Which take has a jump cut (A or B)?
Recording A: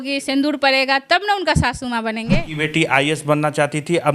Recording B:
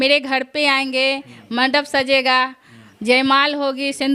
A